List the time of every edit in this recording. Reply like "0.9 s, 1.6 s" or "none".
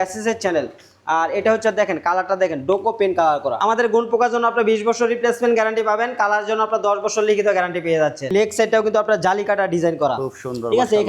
3.5 s, 8.3 s